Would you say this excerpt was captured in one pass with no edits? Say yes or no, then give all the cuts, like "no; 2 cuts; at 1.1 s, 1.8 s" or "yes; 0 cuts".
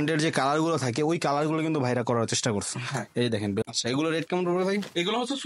no; 1 cut; at 3.6 s